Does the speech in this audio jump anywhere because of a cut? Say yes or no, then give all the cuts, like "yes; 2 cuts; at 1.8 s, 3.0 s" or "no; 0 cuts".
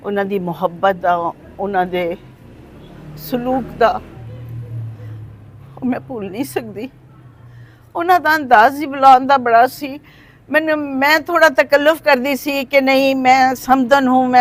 no; 0 cuts